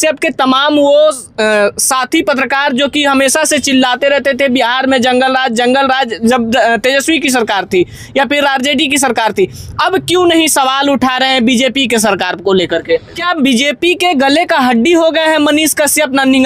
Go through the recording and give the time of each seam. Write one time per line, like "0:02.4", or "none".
0:13.2

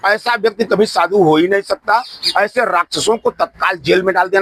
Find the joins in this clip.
0:02.2

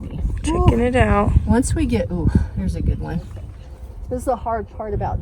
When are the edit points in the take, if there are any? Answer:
0:03.7

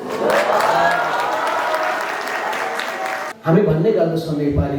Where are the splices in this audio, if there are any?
0:03.3

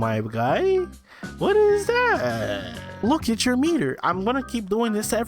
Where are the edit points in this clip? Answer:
0:03.0

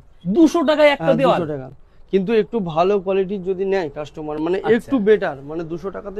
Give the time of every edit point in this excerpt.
none

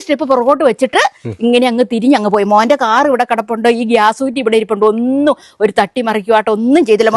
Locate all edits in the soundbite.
none

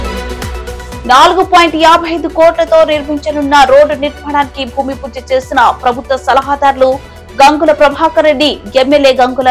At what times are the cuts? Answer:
0:00.9

